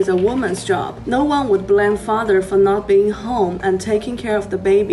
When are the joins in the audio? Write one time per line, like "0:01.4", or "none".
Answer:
none